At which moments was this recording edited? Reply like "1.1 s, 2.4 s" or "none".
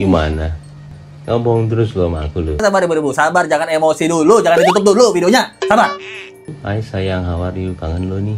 2.6 s